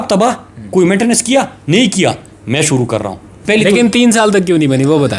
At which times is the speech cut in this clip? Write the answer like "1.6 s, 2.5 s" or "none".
3.4 s